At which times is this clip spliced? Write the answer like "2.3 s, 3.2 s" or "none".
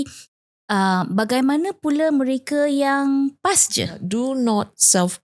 4.0 s